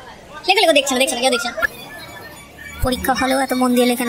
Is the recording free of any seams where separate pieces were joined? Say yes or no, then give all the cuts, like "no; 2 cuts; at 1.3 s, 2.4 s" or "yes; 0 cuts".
no; 1 cut; at 1.7 s